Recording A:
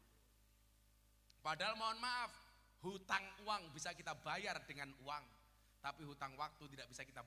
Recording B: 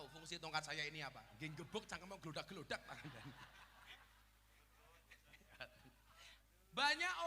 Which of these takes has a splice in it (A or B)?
B